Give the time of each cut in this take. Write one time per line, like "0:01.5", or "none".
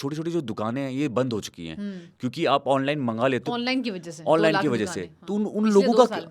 none